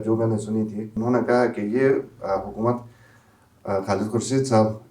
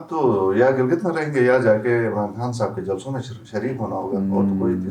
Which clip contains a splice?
first; 1 cut; at 1.0 s

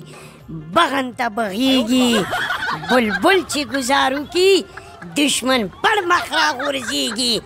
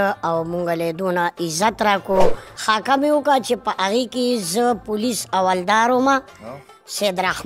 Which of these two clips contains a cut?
second; 1 cut; at 2.5 s

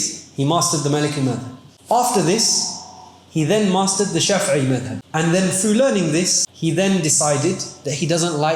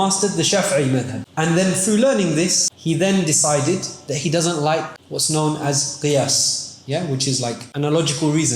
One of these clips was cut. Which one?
second; 1 cut; at 7.6 s

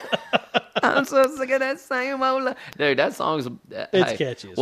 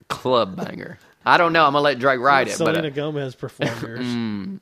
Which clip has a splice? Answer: second; 1 cut; at 1.1 s

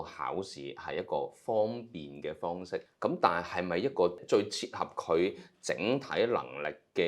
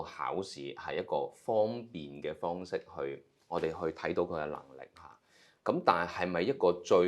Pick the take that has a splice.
first; 2 cuts; at 2.9 s, 4.2 s

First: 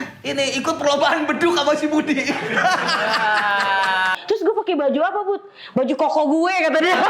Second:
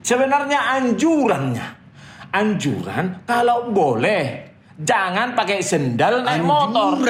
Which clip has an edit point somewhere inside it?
first; 1 cut; at 4.2 s

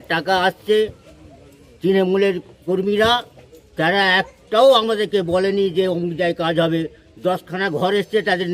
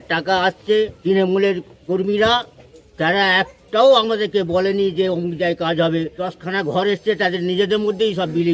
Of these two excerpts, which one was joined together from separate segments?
second; 2 cuts; at 1.0 s, 6.2 s

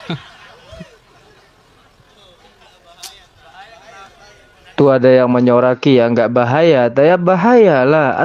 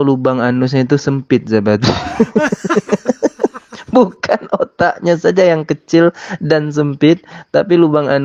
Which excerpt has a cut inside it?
first; 1 cut; at 4.7 s

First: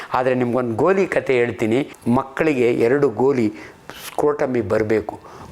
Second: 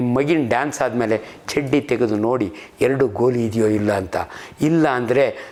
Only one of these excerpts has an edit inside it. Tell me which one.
first; 1 cut; at 1.9 s

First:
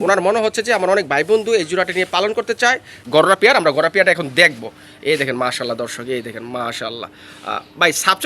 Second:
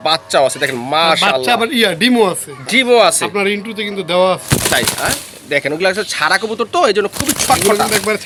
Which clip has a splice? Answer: first; 1 cut; at 2.9 s

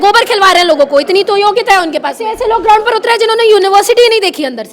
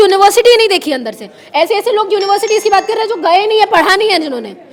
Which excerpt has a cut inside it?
first; 1 cut; at 2.3 s

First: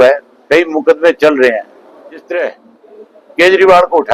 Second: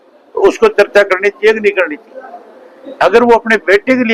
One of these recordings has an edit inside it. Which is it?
first; 1 cut; at 2.2 s

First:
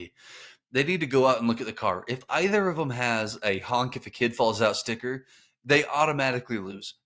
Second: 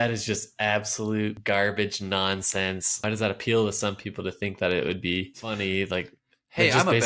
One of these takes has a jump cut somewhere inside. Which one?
second; 3 cuts; at 1.4 s, 3.0 s, 5.5 s

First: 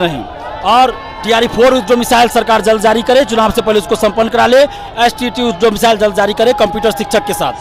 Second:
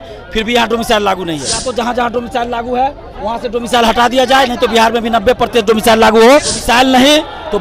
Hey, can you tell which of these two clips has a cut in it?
second; 2 cuts; at 1.6 s, 6.6 s

